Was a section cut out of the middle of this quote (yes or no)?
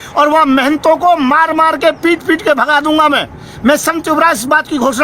no